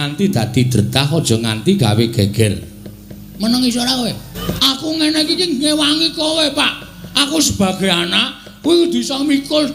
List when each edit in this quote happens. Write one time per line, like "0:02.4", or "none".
0:04.3